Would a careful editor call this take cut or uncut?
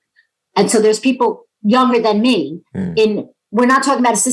uncut